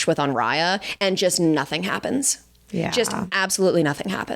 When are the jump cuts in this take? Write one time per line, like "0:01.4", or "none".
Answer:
none

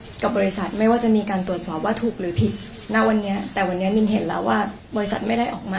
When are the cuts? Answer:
0:04.8

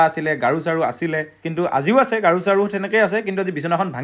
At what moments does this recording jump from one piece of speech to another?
0:01.4

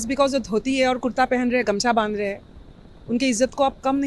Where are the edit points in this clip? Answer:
none

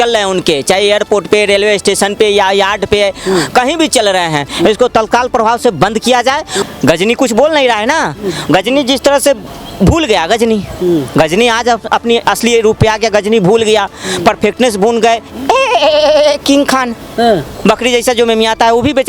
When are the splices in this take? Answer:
0:06.6

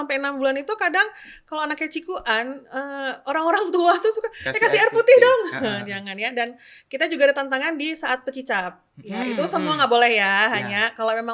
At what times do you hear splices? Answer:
none

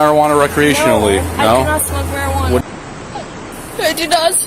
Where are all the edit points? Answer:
0:02.6

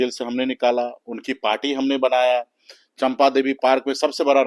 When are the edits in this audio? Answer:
none

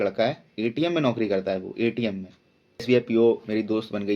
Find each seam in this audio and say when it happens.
0:02.8

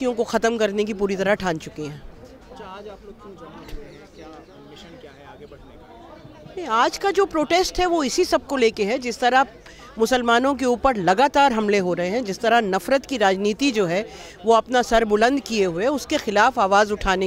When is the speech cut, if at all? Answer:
none

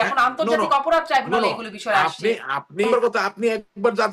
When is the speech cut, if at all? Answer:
0:02.9

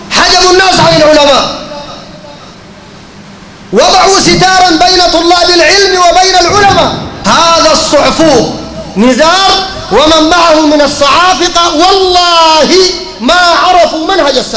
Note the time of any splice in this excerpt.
0:07.1

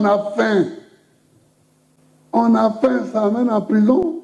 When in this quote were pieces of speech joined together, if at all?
0:02.0

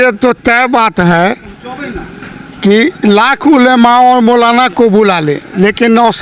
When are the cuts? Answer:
none

